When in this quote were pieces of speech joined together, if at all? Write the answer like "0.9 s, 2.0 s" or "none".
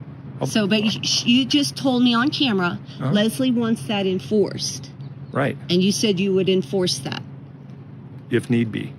none